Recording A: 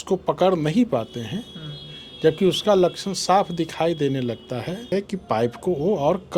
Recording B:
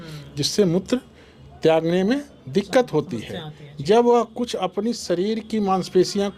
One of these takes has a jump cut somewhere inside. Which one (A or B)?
A